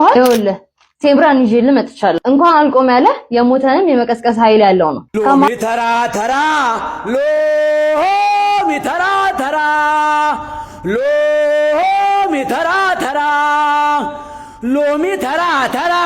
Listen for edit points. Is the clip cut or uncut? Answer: cut